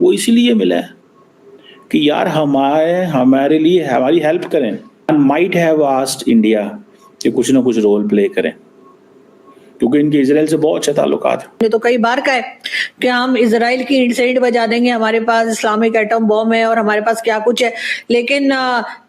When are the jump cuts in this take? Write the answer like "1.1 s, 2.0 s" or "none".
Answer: 5.1 s, 11.6 s